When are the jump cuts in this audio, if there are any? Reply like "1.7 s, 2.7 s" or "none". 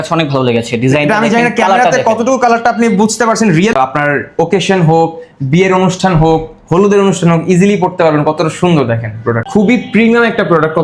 3.7 s, 9.4 s